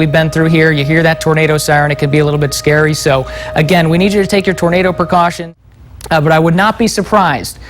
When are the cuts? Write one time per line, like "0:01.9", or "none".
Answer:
0:05.4